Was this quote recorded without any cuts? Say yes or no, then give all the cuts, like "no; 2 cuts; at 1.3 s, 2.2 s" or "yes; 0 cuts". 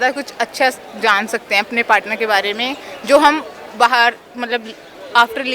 yes; 0 cuts